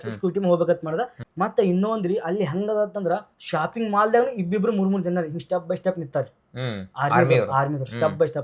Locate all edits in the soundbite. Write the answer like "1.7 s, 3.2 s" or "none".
1.2 s